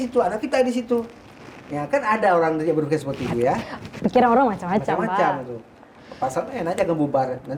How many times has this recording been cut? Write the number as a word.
zero